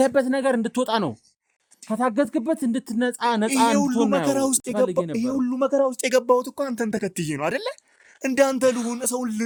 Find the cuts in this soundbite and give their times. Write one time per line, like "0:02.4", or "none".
none